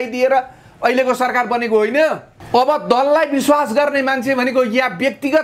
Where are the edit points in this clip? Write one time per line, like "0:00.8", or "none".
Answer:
0:02.3